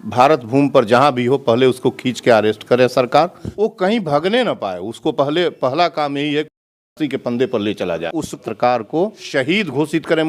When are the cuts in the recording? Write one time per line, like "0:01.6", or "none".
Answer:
0:03.5
0:08.1